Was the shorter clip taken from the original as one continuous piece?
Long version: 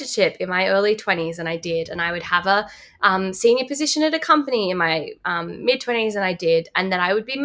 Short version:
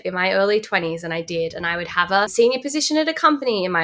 no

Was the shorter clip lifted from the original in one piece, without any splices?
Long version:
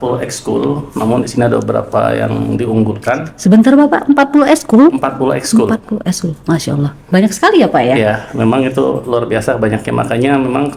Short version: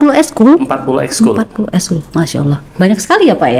yes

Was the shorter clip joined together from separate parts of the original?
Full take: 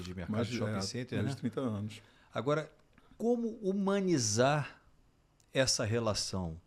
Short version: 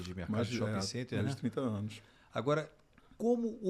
no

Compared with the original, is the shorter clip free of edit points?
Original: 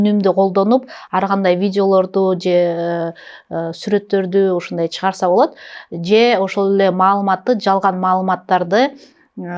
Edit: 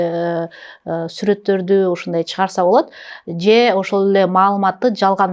yes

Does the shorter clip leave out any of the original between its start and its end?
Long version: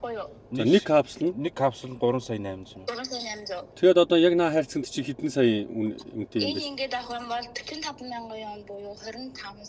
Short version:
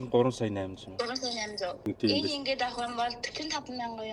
yes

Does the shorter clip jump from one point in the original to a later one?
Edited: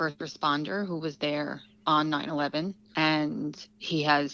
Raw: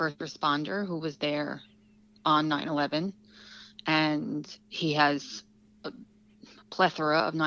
yes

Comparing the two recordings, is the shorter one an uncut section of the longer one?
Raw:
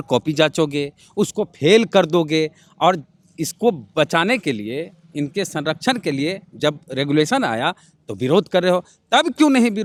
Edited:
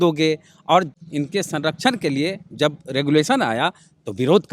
no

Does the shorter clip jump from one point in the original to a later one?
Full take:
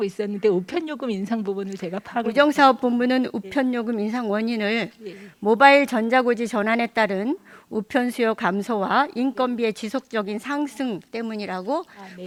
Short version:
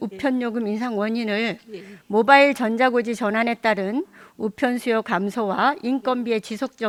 no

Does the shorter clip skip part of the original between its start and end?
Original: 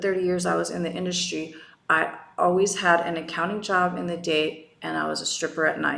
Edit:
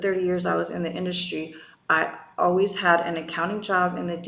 no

